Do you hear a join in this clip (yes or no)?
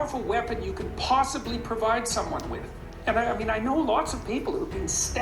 no